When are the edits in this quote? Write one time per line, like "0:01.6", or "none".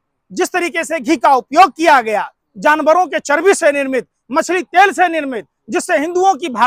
none